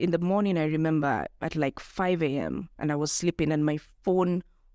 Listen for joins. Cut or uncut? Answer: uncut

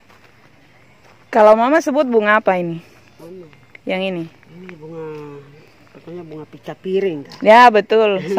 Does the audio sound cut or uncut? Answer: uncut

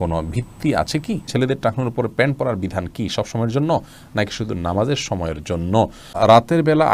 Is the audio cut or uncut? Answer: cut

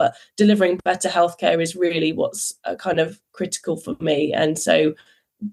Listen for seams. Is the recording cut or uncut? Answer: uncut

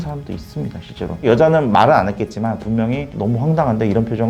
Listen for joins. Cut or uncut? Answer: cut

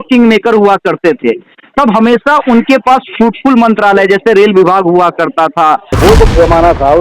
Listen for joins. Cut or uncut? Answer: cut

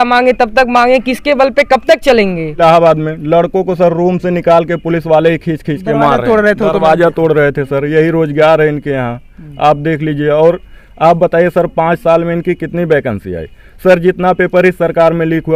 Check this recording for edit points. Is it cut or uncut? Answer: cut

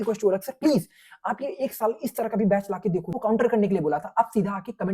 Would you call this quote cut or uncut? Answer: cut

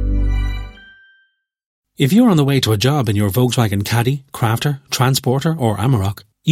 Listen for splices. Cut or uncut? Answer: cut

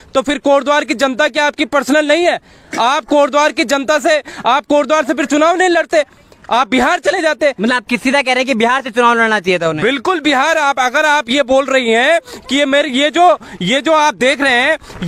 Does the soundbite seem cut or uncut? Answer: uncut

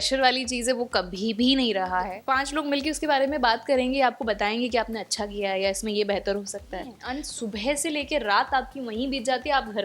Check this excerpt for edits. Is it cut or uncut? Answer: cut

